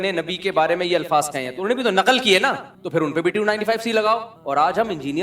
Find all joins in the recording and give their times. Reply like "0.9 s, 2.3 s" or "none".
4.3 s